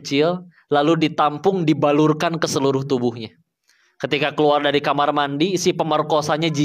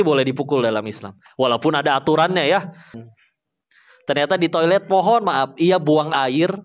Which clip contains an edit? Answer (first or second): second